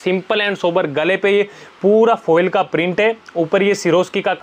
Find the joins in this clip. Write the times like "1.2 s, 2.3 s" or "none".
none